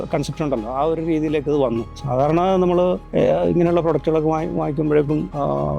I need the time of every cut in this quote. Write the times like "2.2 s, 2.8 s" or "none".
2.0 s